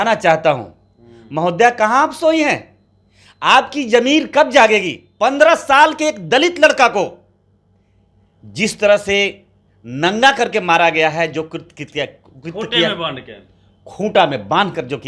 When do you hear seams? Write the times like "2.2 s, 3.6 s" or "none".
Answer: 5.0 s